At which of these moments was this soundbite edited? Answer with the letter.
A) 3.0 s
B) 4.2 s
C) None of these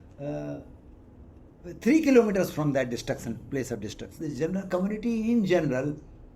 B